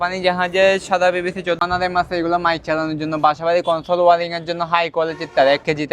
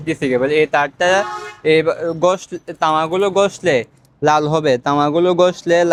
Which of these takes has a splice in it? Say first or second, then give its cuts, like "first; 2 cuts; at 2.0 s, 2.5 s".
first; 1 cut; at 1.7 s